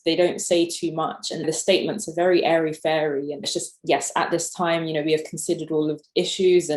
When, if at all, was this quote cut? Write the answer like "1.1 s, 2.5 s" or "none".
1.5 s, 3.5 s, 6.0 s